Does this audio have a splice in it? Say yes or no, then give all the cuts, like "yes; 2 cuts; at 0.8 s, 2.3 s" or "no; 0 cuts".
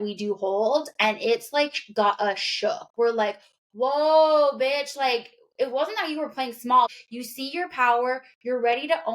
yes; 1 cut; at 7.0 s